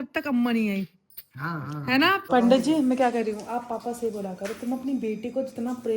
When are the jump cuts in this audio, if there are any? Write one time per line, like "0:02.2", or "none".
0:02.2